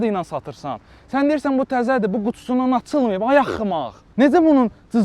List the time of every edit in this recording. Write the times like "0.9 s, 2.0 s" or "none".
none